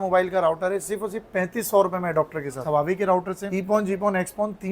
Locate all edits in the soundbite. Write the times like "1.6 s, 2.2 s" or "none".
2.6 s, 3.4 s